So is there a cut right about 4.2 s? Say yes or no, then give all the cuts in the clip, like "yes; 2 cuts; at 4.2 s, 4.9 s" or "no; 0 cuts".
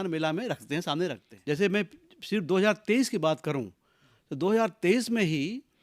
no; 1 cut; at 1.3 s